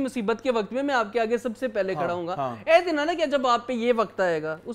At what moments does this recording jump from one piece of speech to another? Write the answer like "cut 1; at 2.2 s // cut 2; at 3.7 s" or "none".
none